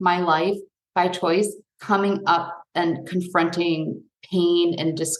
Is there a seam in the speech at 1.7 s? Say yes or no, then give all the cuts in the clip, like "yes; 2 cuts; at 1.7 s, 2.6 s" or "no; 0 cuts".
yes; 1 cut; at 1.7 s